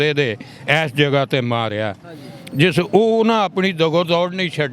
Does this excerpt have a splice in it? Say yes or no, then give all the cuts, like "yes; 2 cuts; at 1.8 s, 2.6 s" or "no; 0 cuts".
no; 0 cuts